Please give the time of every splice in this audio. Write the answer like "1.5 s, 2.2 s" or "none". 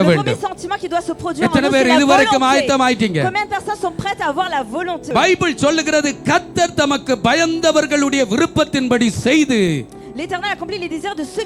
5.1 s